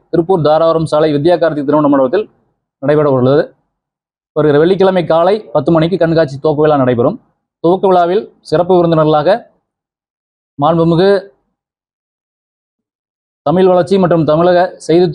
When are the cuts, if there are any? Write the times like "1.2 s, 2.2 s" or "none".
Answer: none

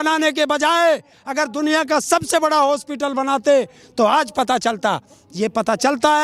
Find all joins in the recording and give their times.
none

